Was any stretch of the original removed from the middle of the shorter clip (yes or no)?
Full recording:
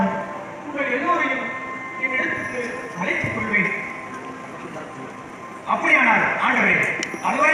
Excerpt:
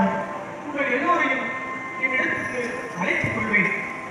no